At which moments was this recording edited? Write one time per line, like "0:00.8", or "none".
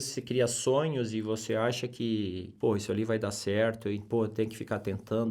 0:02.5
0:04.0